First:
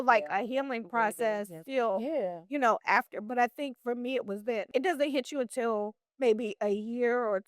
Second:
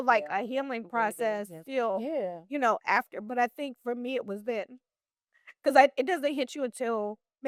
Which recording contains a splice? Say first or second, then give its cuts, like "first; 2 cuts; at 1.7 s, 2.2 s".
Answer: first; 1 cut; at 4.7 s